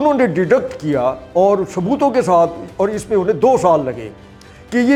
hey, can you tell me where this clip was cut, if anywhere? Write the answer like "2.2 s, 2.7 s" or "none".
none